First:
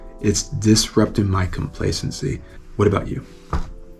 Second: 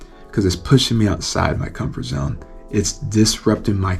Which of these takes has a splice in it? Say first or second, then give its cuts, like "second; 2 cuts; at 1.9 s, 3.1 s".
first; 1 cut; at 2.5 s